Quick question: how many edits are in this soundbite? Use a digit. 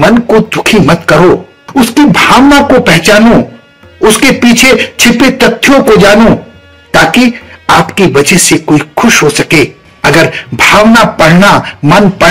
0